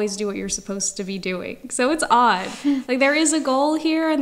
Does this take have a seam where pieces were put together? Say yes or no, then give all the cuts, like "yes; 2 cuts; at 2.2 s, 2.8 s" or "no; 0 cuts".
no; 0 cuts